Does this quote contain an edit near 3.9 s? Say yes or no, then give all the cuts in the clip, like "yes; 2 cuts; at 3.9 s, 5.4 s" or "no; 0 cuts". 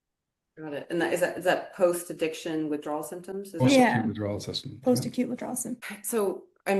no; 1 cut; at 5.8 s